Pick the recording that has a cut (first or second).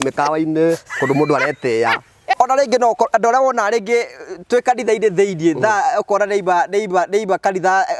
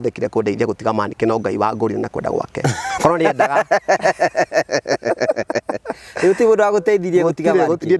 first